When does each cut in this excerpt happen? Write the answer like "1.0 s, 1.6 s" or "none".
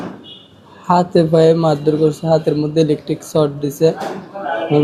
none